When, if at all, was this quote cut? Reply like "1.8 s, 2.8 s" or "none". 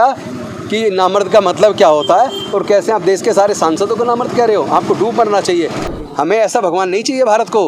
5.8 s